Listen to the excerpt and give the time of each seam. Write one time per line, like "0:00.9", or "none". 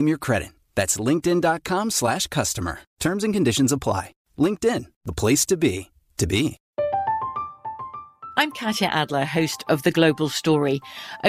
0:06.6